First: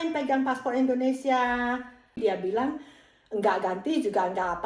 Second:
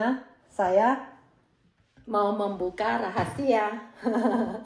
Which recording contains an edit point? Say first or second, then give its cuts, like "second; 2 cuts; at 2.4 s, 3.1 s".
first; 1 cut; at 2.2 s